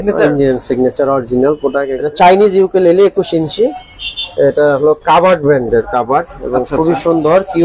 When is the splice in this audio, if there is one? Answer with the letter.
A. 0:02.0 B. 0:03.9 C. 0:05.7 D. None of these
A